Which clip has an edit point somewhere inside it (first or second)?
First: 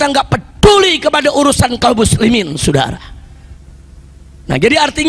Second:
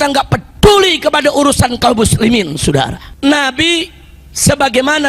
second